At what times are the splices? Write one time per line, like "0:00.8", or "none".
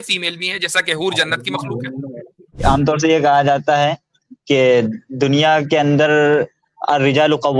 0:02.6